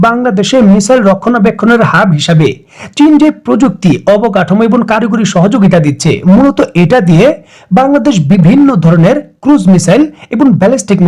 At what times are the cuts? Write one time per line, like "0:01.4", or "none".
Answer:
none